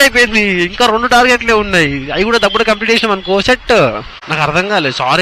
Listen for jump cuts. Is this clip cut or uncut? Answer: cut